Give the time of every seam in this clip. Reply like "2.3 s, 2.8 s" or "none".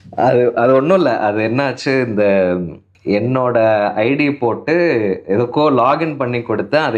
2.9 s